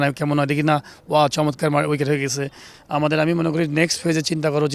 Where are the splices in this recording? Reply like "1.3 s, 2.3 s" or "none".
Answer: 2.7 s